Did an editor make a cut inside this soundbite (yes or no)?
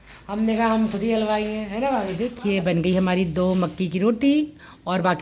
yes